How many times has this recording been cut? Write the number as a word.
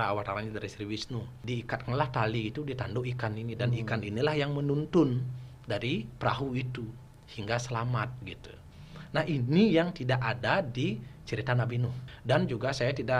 two